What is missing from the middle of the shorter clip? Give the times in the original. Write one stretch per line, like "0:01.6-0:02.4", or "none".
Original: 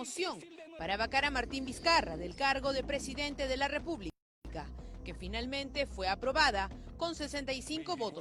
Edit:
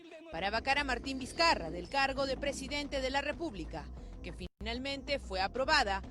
0:04.5-0:04.7